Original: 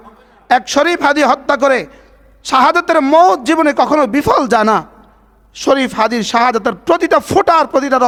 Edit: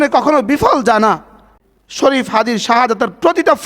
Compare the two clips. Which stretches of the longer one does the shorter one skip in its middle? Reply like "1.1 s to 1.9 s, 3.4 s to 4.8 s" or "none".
none